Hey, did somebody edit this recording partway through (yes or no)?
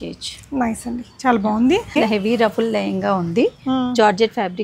yes